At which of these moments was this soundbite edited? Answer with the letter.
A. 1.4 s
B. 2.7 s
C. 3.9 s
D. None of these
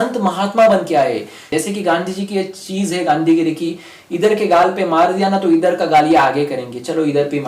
A